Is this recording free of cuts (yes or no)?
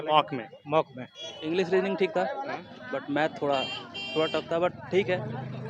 no